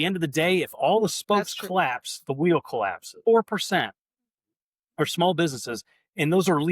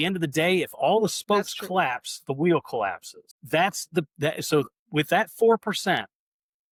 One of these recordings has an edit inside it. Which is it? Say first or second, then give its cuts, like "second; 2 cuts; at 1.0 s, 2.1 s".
first; 1 cut; at 3.2 s